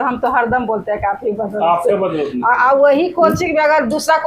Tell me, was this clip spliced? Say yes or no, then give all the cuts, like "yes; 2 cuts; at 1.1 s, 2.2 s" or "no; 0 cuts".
no; 0 cuts